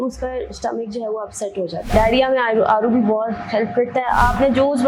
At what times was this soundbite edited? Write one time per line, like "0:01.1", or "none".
0:01.8